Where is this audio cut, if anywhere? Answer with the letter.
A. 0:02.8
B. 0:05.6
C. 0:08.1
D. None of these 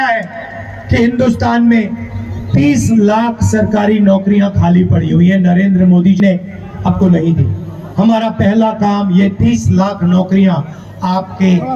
D